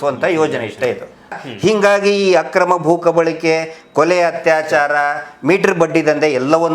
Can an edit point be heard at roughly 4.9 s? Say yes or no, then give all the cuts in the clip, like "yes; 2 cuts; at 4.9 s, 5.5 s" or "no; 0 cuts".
no; 1 cut; at 1.3 s